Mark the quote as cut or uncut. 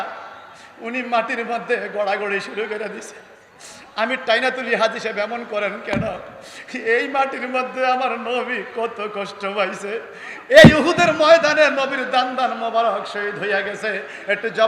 uncut